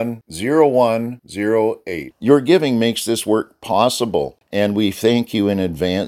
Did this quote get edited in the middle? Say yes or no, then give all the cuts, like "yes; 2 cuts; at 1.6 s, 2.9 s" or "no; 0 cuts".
yes; 1 cut; at 4.4 s